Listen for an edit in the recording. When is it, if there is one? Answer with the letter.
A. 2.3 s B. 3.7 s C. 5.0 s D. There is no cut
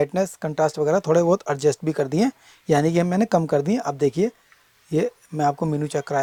D